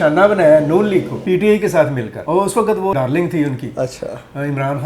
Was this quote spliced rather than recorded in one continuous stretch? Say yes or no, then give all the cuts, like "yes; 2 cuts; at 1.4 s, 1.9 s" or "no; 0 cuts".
yes; 2 cuts; at 1.1 s, 2.1 s